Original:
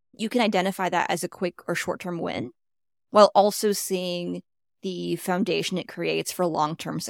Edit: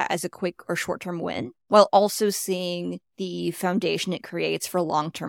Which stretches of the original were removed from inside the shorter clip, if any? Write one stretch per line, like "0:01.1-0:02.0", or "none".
0:02.6-0:03.0
0:04.5-0:04.7